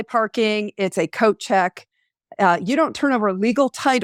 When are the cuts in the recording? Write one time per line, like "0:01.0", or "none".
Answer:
none